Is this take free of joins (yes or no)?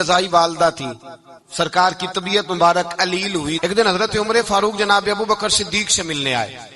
no